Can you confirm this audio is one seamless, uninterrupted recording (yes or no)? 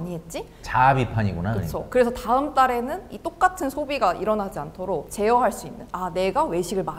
yes